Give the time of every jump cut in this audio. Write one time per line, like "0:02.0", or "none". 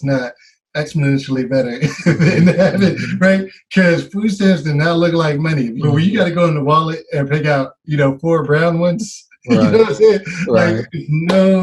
0:05.7